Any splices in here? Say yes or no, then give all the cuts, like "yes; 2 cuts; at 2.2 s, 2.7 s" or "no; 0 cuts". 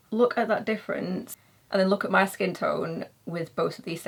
no; 0 cuts